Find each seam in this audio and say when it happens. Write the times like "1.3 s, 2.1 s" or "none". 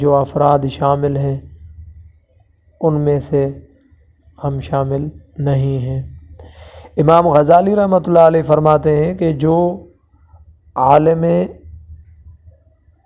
none